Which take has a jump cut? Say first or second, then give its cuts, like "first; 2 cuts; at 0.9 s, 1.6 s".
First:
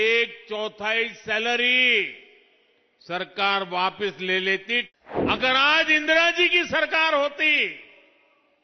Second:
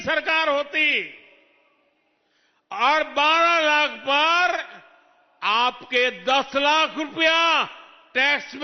first; 1 cut; at 4.9 s